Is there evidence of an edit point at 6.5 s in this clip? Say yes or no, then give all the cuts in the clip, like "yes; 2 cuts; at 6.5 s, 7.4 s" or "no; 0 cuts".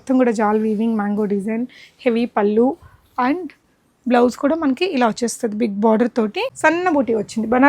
yes; 1 cut; at 6.5 s